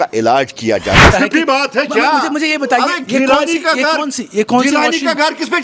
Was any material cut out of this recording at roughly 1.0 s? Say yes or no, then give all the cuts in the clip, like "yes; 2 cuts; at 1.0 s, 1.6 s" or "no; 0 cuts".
yes; 1 cut; at 1.0 s